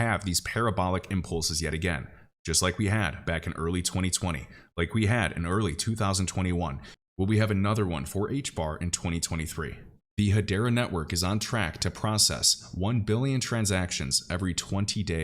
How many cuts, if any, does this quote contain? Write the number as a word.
one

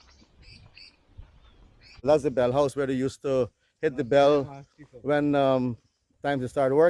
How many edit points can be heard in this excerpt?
one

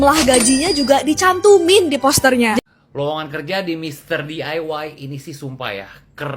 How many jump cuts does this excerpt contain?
one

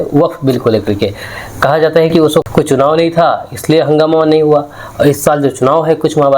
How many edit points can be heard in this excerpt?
one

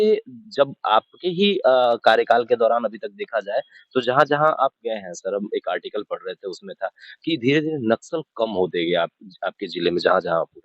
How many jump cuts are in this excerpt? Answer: zero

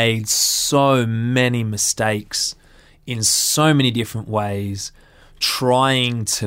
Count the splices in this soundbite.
zero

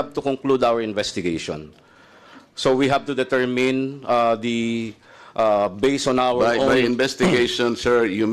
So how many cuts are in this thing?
zero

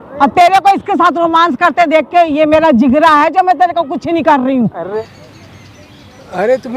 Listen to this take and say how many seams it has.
one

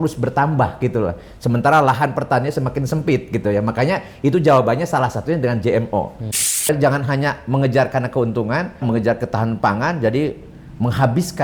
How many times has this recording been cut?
two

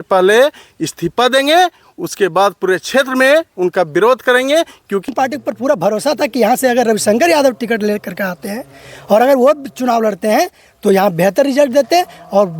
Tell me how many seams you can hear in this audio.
one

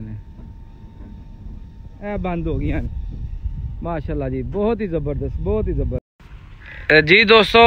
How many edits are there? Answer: one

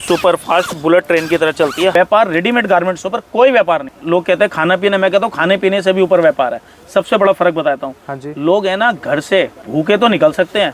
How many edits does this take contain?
three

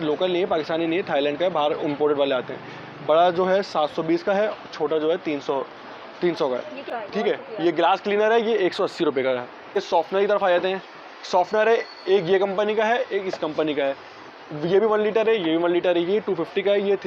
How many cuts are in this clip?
two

